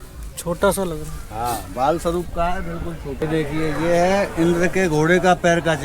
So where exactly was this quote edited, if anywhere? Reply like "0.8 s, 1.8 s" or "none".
3.2 s